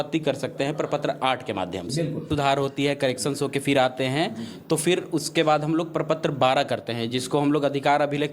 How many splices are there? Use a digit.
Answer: 1